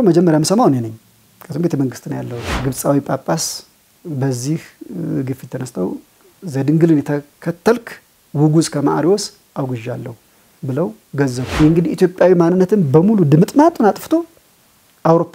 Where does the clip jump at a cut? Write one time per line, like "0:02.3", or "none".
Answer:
0:02.4
0:11.5